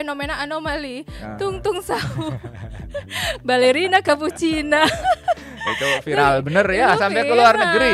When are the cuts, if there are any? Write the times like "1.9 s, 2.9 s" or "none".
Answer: none